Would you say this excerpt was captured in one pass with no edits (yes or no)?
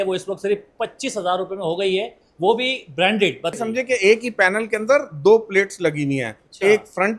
no